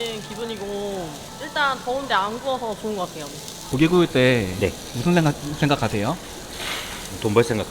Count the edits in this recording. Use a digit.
1